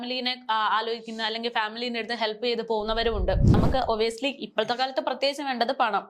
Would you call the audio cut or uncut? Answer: cut